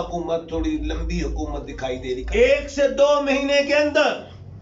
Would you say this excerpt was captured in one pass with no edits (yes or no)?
no